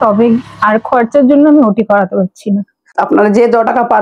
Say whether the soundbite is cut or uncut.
cut